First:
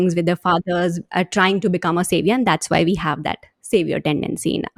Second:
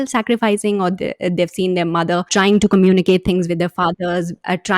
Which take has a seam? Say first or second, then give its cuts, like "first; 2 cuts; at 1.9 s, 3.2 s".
second; 1 cut; at 2.3 s